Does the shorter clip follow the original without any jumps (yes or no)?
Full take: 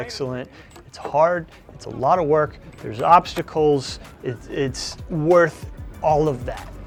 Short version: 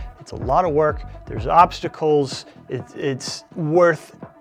yes